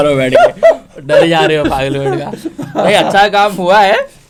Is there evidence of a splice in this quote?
no; 0 cuts

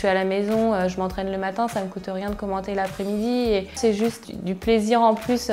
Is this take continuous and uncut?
no; 1 cut; at 4.2 s

